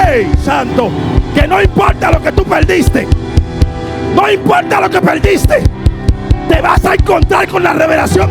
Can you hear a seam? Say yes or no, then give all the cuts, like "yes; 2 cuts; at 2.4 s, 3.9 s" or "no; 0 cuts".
no; 0 cuts